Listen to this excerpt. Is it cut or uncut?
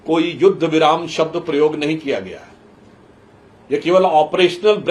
uncut